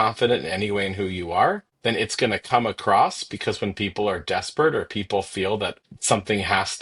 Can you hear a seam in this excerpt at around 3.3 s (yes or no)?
no